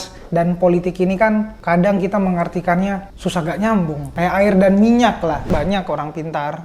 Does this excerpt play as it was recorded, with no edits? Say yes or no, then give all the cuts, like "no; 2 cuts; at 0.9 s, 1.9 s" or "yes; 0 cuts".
no; 4 cuts; at 1.5 s, 3.1 s, 4.2 s, 5.5 s